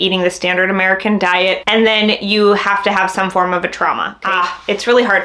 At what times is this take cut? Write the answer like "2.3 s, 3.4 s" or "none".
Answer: 1.6 s, 4.2 s

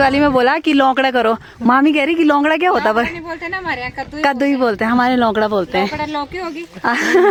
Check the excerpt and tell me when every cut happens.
none

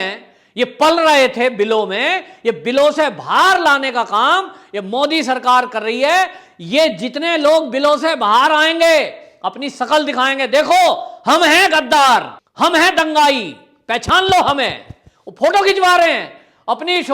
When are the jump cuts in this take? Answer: 12.4 s

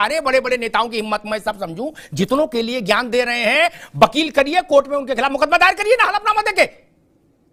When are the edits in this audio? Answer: none

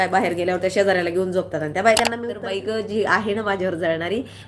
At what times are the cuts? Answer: 2.4 s

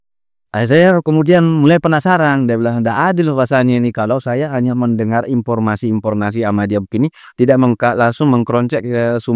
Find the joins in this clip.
none

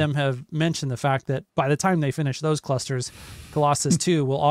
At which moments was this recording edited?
1.5 s

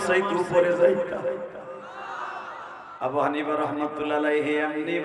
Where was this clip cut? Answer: 2.9 s

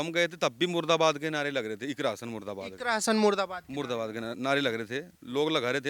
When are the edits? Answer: none

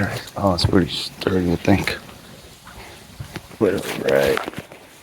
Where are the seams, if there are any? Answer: 3.5 s

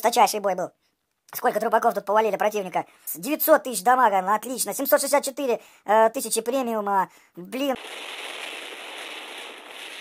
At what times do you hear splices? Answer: 3.1 s, 7.8 s

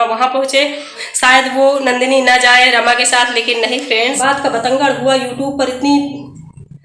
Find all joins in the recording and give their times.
1.1 s, 4.2 s

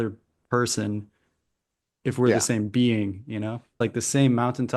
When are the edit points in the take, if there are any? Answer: 3.8 s

